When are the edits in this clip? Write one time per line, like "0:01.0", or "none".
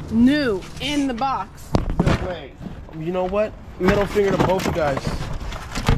none